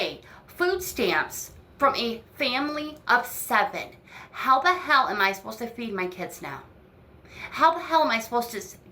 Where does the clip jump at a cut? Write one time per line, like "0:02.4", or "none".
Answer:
0:04.5

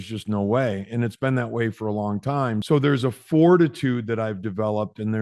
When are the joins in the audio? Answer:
0:02.6

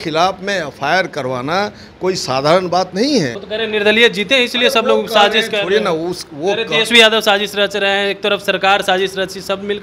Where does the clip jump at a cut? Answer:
0:03.4

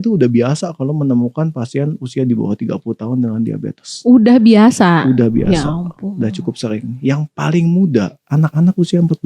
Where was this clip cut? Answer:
0:08.2

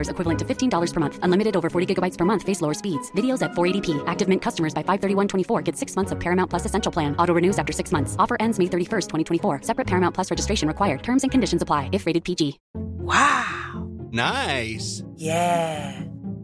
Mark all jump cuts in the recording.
none

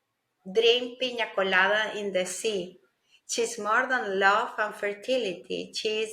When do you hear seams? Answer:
none

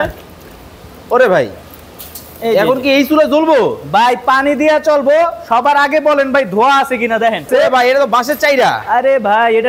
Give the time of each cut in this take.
0:07.5

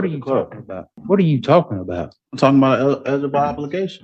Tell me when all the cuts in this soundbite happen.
0:00.9

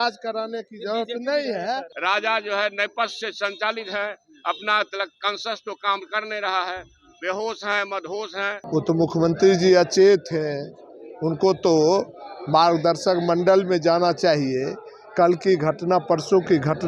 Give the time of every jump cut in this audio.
0:01.9
0:08.6

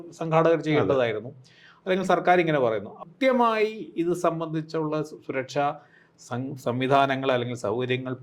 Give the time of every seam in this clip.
0:03.0

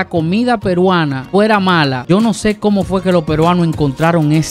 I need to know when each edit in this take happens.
0:02.0

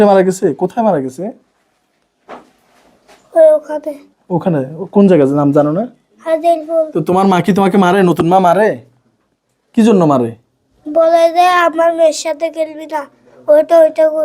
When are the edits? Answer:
0:06.9

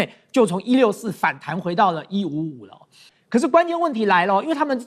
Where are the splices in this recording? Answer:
0:03.1

